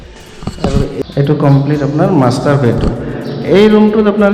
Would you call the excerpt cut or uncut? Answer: cut